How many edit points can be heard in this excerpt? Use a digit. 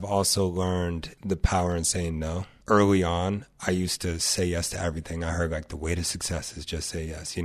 2